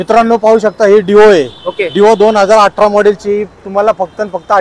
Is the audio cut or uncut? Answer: uncut